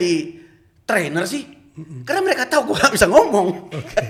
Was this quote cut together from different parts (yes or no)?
no